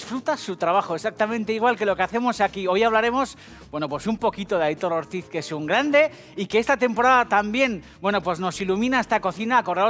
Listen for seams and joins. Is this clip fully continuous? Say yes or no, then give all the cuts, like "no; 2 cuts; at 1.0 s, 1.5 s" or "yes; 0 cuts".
no; 1 cut; at 3.1 s